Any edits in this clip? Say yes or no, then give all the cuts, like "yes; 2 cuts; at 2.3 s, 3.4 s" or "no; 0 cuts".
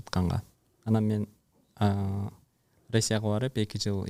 no; 0 cuts